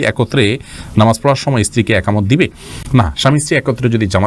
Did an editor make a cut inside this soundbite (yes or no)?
no